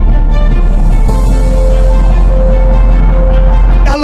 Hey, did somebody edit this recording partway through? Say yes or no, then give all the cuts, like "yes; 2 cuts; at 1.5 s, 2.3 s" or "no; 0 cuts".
no; 0 cuts